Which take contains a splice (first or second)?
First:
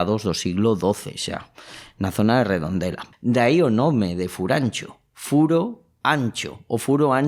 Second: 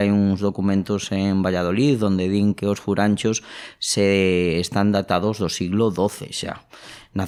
first